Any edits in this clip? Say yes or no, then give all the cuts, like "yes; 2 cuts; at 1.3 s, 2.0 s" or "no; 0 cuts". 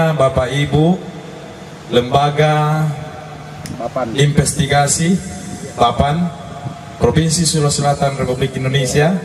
no; 0 cuts